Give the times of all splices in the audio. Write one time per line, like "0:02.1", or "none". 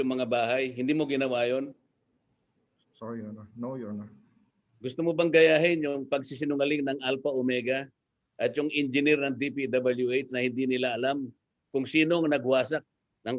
none